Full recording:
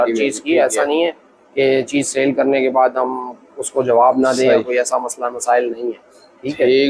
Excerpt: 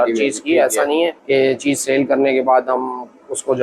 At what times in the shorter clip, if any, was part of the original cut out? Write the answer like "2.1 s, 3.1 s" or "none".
1.2 s